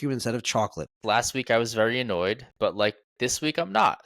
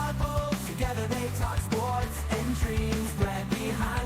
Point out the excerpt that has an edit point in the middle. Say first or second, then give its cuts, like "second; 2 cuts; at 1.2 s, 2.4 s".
first; 1 cut; at 1.0 s